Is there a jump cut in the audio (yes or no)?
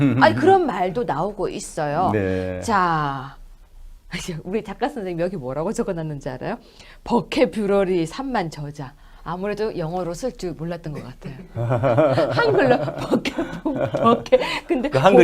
yes